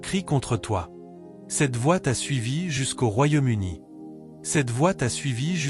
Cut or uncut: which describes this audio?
uncut